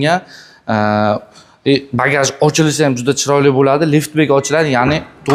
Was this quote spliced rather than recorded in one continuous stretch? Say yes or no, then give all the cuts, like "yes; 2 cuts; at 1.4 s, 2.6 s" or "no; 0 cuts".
no; 0 cuts